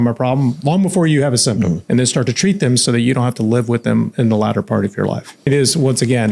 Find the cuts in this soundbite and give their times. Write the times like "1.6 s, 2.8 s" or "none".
1.8 s, 5.5 s